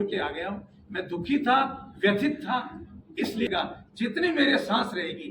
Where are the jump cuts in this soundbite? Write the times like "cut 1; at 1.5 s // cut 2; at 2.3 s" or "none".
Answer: cut 1; at 3.5 s